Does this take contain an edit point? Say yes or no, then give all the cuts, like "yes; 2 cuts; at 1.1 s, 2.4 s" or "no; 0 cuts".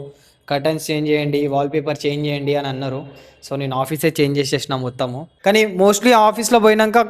yes; 1 cut; at 5.2 s